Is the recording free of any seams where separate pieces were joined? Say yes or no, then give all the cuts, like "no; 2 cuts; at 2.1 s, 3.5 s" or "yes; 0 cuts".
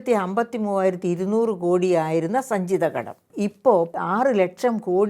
no; 2 cuts; at 3.2 s, 3.9 s